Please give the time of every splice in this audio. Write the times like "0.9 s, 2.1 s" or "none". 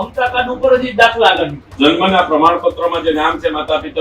1.6 s